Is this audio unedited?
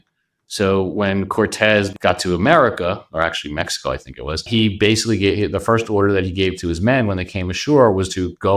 no; 2 cuts; at 1.9 s, 4.5 s

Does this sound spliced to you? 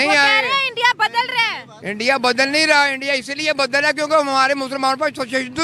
no; 0 cuts

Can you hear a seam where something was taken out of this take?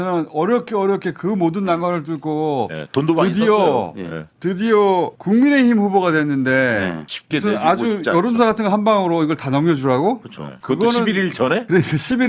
no; 0 cuts

